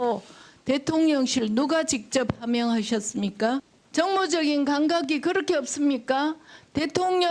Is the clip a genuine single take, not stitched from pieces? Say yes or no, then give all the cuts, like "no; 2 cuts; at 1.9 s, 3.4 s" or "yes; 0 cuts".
no; 1 cut; at 3.8 s